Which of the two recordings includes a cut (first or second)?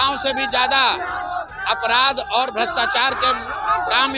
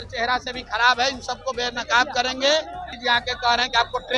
second